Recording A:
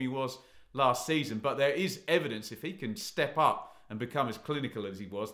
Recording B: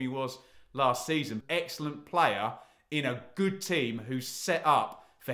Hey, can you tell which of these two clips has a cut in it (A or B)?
B